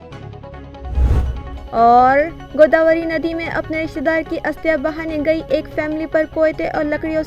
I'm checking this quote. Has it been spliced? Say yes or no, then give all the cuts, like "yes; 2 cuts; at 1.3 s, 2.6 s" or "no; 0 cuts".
yes; 1 cut; at 1.1 s